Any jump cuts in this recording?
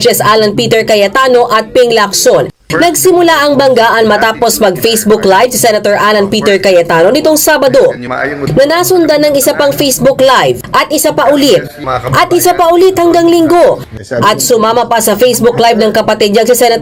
no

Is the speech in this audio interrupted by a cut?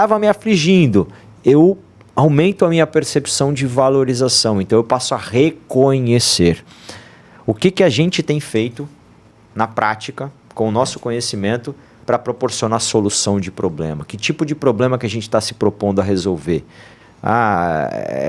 no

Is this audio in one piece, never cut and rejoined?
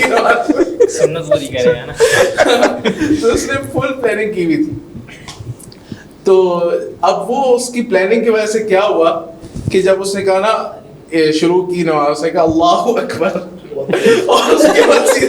yes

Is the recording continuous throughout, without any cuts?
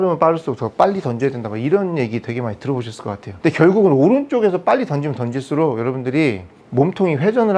no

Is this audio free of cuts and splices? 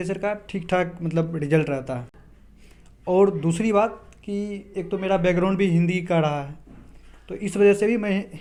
yes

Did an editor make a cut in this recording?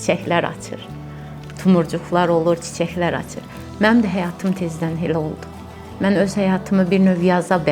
no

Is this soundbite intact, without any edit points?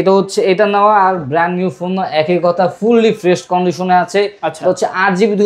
yes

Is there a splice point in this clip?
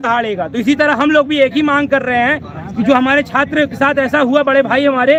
no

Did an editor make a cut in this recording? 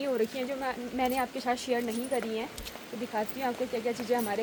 no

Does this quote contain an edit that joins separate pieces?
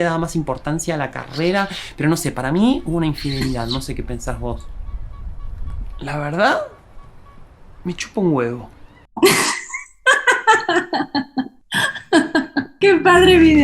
yes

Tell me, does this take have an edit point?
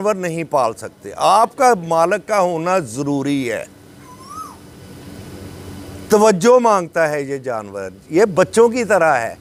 no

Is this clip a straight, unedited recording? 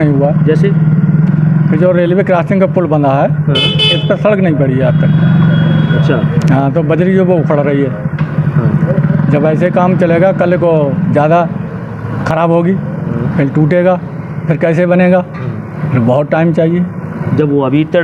yes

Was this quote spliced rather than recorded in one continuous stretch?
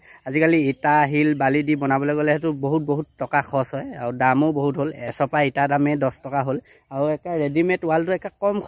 yes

